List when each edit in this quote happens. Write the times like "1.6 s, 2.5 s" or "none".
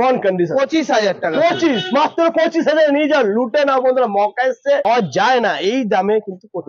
4.8 s

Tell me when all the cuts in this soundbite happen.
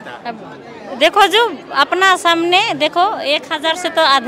none

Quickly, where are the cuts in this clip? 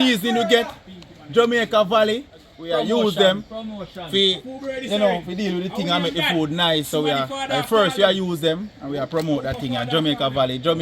2.5 s

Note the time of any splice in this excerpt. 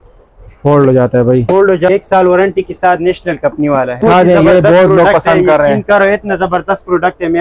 1.9 s, 4.0 s

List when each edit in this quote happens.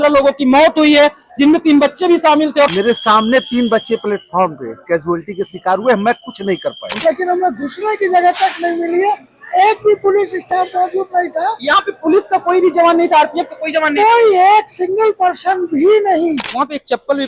2.7 s, 7.0 s, 16.5 s

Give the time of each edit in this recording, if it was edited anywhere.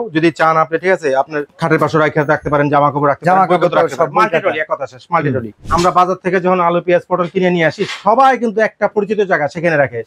1.5 s, 5.6 s

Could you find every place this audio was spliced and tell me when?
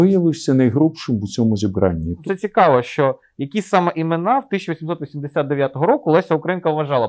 2.2 s

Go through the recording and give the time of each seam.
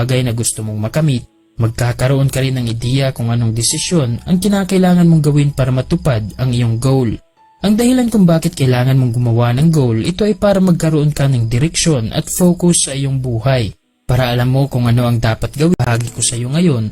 15.7 s

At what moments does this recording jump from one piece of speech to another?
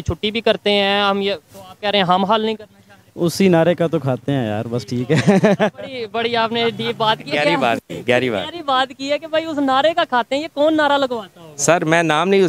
none

